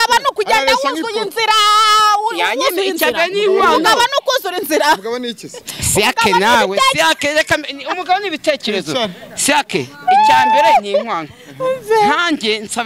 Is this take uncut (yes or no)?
yes